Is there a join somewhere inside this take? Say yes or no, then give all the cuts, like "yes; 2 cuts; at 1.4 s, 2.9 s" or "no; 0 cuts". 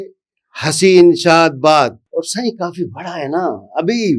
yes; 1 cut; at 2.0 s